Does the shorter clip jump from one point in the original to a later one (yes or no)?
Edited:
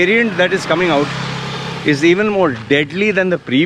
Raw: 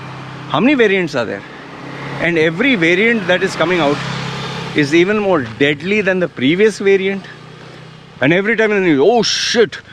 no